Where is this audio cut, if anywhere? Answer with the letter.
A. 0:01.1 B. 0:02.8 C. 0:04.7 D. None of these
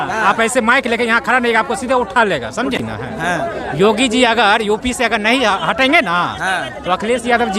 B